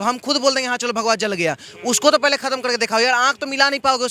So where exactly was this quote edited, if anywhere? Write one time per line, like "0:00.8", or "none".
none